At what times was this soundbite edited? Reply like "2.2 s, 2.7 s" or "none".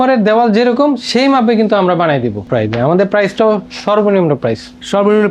2.5 s